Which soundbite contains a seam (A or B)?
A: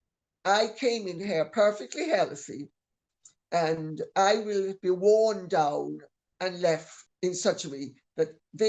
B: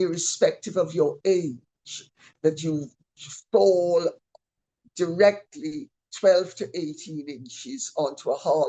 A